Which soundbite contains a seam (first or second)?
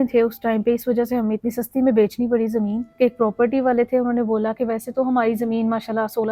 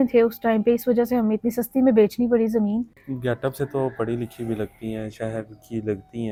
first